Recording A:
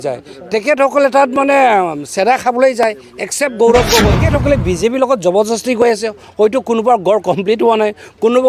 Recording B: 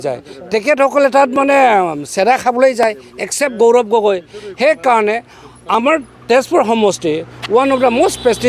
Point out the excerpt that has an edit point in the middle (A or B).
A